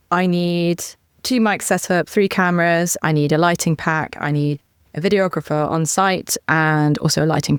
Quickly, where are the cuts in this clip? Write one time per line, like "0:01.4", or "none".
none